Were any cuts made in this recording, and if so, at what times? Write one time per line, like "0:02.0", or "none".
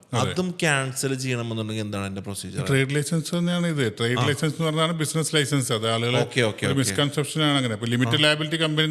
none

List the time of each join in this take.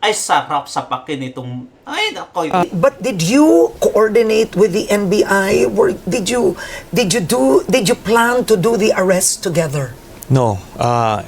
0:02.7

